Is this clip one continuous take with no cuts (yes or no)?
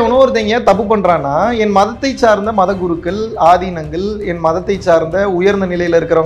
yes